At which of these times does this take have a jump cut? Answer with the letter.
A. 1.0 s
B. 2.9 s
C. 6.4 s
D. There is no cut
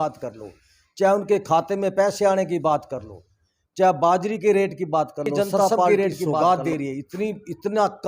C